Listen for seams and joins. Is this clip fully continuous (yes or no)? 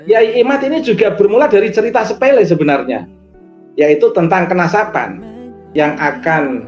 no